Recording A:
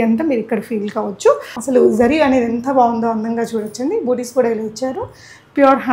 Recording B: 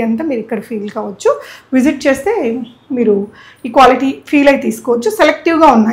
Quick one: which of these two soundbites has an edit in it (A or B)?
A